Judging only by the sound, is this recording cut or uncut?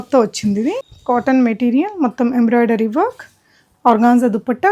cut